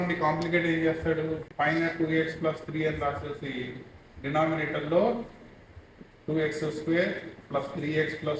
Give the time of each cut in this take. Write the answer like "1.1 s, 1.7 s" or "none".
1.5 s